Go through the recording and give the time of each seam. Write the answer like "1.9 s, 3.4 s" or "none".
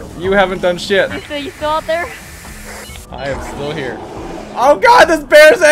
1.2 s